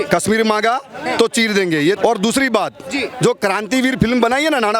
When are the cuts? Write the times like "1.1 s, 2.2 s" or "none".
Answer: 2.0 s

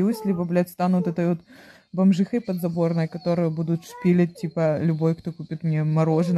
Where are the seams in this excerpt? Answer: none

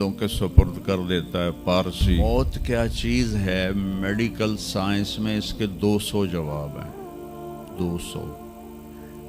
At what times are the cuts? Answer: 2.2 s

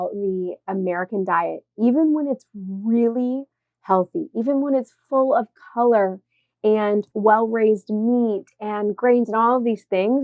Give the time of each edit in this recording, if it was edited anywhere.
7.1 s

